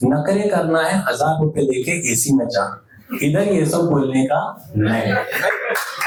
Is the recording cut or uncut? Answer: uncut